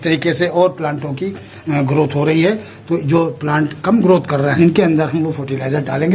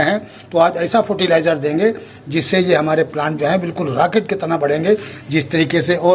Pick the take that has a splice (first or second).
first